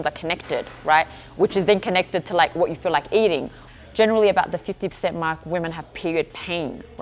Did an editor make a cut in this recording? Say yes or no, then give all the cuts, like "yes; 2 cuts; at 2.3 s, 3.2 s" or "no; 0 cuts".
yes; 1 cut; at 3.6 s